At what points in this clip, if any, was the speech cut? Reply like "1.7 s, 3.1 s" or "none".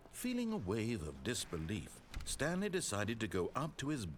none